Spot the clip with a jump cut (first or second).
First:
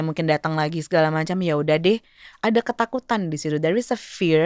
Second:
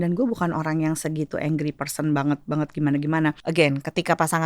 second